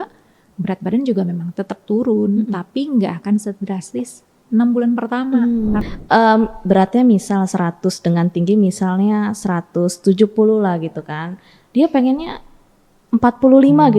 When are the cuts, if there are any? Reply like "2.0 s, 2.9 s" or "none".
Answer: 5.8 s